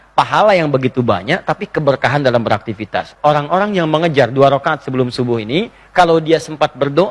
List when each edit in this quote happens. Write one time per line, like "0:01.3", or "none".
0:03.1